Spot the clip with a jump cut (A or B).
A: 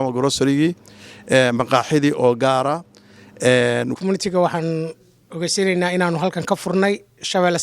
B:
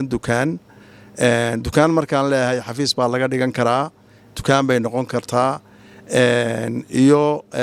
A